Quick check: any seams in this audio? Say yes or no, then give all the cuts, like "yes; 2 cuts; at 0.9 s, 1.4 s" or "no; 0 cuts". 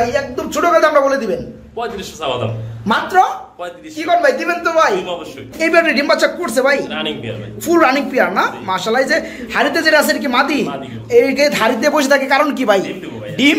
yes; 1 cut; at 5.4 s